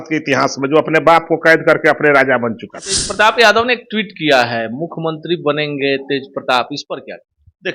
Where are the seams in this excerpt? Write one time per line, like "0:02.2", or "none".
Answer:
0:03.1